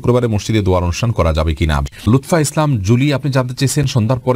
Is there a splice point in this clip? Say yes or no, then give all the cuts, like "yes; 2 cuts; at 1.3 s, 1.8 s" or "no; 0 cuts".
yes; 1 cut; at 1.9 s